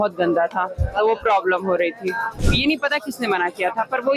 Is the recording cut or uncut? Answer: cut